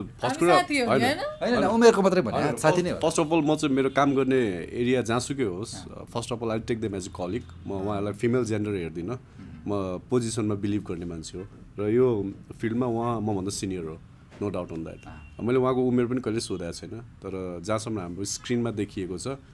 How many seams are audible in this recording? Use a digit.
0